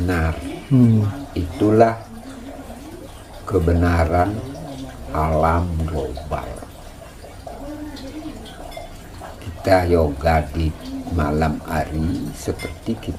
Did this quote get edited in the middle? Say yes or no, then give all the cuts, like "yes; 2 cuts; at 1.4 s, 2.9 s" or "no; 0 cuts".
no; 0 cuts